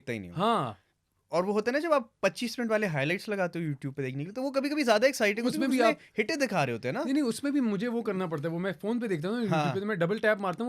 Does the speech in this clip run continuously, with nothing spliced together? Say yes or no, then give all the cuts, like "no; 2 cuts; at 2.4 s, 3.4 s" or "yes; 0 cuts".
yes; 0 cuts